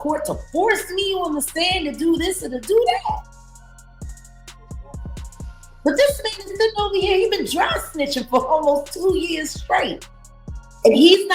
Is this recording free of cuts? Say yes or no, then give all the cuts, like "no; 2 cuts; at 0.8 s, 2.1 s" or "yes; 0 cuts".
no; 2 cuts; at 3.3 s, 5.5 s